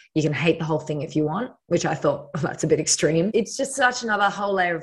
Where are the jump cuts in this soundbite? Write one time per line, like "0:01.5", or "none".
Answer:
0:03.3